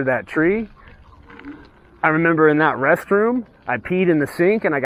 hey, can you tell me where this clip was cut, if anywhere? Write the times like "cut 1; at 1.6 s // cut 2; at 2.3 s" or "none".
none